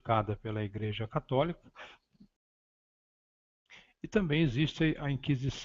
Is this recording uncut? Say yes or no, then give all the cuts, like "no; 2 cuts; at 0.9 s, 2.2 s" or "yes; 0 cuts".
no; 1 cut; at 4.0 s